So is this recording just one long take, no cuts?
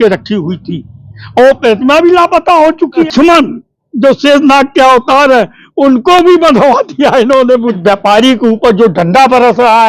no; 2 cuts; at 3.1 s, 7.7 s

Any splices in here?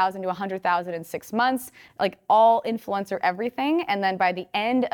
no; 0 cuts

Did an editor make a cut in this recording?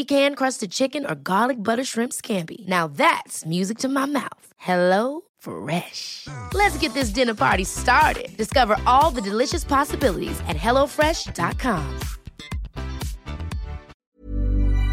yes; 1 cut; at 14.0 s

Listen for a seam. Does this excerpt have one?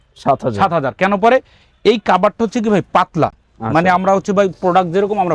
no; 0 cuts

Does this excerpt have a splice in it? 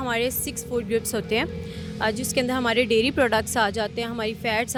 no; 0 cuts

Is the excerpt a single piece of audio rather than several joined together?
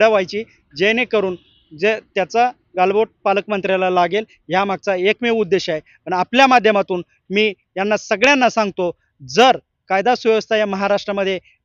yes; 0 cuts

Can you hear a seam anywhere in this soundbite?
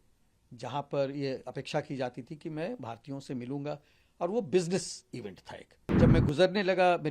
yes; 1 cut; at 5.9 s

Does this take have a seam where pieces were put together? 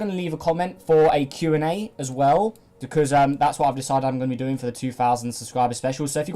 yes; 1 cut; at 4.4 s

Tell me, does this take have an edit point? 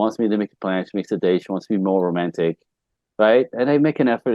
no; 0 cuts

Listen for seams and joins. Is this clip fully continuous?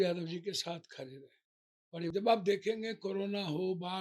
no; 1 cut; at 2.1 s

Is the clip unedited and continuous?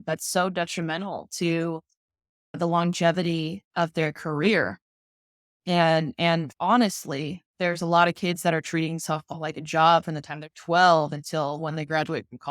no; 2 cuts; at 2.6 s, 6.5 s

